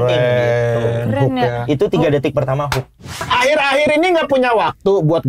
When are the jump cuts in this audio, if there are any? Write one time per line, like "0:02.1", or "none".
0:03.2

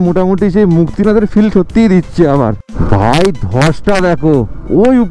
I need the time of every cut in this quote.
0:02.7

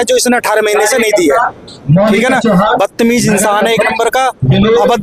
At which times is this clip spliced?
none

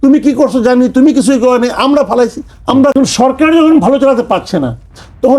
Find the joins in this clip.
0:02.9

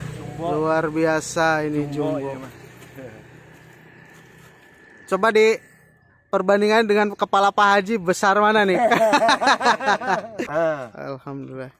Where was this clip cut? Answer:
0:10.6

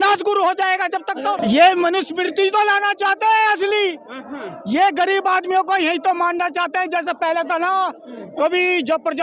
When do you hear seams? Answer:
0:01.4

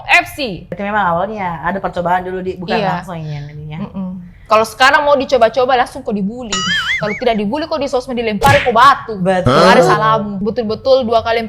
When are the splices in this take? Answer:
0:00.8
0:10.3

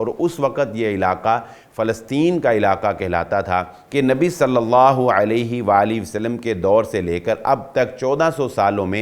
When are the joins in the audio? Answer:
0:03.8

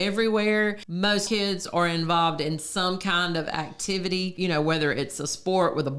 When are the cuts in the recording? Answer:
0:01.2
0:04.3

